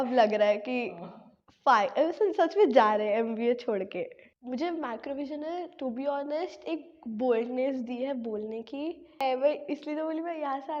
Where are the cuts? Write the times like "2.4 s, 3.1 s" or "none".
4.3 s, 9.2 s